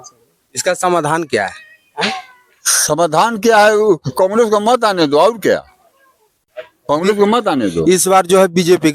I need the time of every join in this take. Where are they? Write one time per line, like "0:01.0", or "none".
none